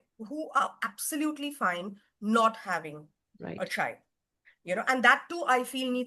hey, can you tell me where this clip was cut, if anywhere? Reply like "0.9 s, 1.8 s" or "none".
none